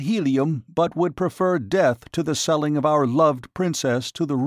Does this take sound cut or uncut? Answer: uncut